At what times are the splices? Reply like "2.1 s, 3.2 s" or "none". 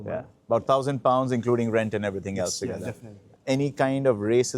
3.3 s